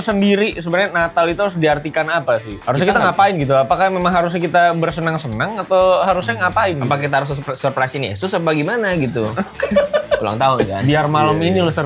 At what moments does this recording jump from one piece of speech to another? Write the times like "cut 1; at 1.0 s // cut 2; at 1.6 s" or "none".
cut 1; at 2.5 s